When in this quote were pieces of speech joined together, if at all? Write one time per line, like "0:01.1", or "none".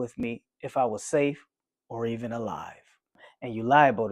0:03.1